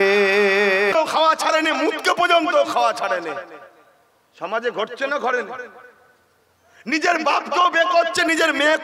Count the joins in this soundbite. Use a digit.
1